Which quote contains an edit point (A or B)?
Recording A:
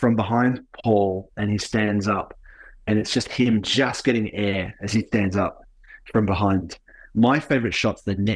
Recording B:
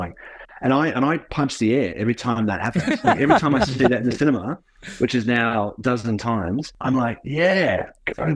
B